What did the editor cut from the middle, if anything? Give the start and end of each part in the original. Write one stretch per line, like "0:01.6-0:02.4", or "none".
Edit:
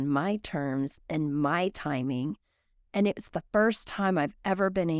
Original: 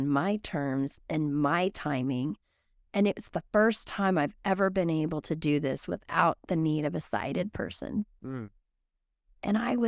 none